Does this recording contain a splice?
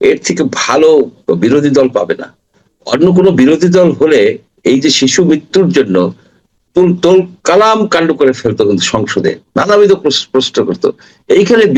no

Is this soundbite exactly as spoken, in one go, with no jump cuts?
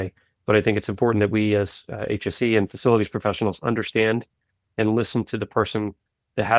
yes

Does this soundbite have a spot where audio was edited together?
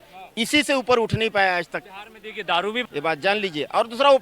yes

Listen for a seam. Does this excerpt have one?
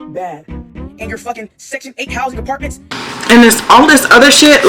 yes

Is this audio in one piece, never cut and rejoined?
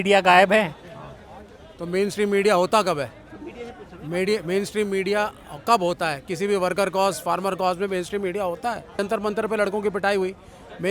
no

